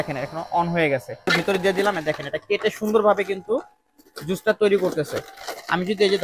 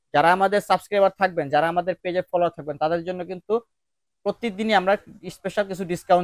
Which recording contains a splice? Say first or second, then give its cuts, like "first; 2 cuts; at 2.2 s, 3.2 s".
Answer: first; 1 cut; at 1.4 s